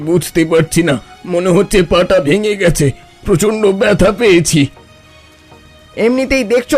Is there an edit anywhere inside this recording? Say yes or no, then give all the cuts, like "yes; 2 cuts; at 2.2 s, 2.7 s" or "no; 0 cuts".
no; 0 cuts